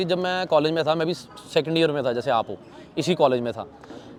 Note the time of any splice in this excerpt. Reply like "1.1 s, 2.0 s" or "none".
none